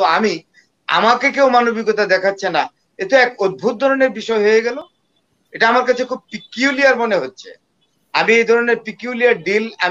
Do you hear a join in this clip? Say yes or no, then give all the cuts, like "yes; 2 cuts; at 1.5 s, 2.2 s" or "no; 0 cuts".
no; 0 cuts